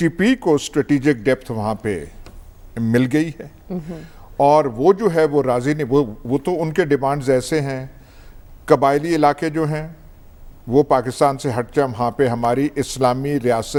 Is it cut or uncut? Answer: uncut